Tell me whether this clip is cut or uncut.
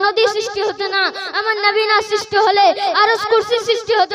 uncut